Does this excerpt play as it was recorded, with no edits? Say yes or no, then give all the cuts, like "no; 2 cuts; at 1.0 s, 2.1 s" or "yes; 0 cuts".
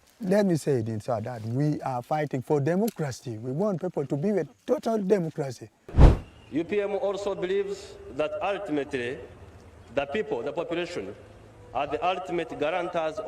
no; 1 cut; at 5.9 s